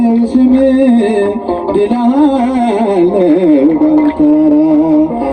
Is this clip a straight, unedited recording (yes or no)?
yes